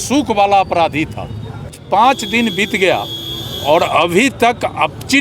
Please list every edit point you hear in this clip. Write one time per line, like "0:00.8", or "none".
0:01.8